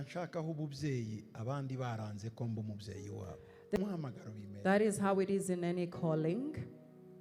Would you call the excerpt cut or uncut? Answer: cut